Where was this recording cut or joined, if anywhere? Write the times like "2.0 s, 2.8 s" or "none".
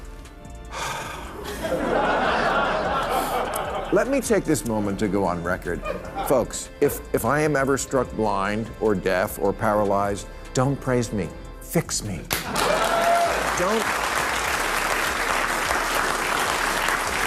none